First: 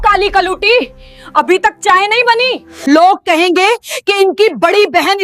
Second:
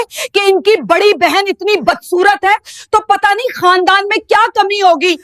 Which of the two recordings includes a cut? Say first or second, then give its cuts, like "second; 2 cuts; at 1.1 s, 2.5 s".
first; 1 cut; at 2.7 s